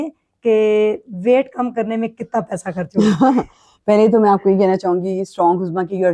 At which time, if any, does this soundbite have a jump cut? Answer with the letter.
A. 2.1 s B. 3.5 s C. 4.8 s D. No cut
D